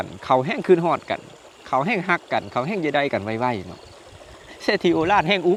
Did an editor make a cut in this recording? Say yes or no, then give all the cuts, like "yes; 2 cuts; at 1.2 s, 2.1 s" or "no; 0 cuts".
no; 0 cuts